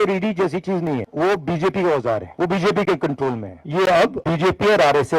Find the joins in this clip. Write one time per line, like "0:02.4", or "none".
0:01.1
0:02.3
0:03.5
0:04.2